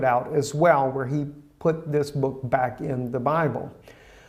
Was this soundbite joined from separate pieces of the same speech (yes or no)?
yes